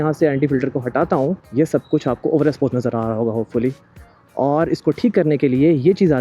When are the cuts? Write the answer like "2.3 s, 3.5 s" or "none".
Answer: 1.4 s